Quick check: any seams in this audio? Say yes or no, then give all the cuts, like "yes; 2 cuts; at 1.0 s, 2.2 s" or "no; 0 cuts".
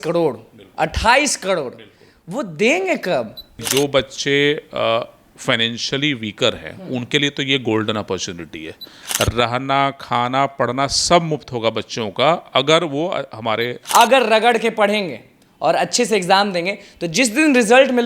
yes; 3 cuts; at 3.6 s, 9.0 s, 13.8 s